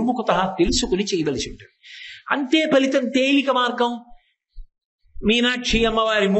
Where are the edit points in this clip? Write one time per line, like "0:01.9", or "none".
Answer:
none

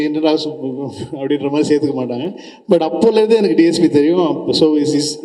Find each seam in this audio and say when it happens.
none

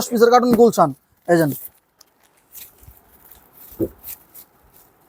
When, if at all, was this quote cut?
none

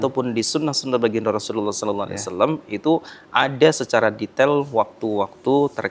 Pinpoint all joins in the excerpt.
none

